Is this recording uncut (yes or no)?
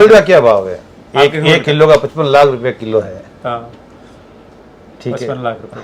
yes